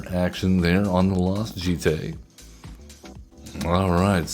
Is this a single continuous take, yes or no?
no